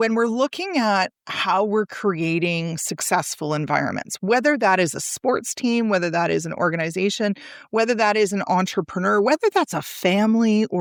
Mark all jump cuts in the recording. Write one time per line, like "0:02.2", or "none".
none